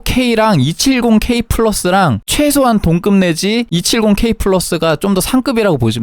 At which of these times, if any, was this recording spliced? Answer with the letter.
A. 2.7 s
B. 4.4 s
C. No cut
C